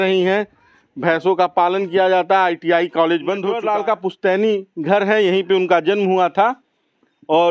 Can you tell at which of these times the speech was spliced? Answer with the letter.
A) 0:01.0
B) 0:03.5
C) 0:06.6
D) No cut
B